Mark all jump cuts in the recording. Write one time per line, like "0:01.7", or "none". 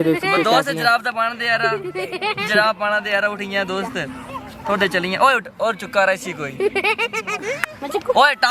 none